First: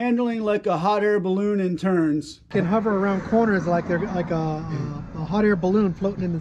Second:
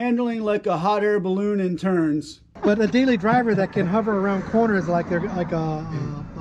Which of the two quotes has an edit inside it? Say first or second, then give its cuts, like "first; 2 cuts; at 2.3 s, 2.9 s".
first; 1 cut; at 2.5 s